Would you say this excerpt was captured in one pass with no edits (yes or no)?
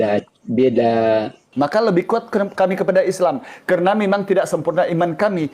no